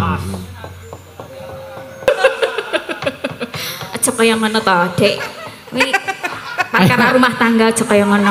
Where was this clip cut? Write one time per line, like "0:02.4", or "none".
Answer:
0:02.1